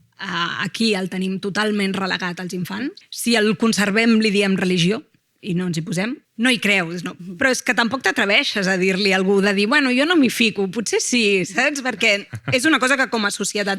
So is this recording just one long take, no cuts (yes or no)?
no